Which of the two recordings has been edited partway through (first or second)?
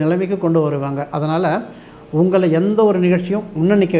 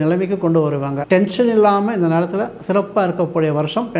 second